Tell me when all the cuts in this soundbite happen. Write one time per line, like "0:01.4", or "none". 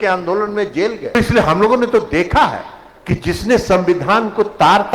0:01.1